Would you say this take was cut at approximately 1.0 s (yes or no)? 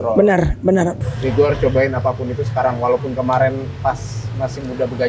yes